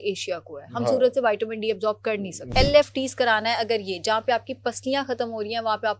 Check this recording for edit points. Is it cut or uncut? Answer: cut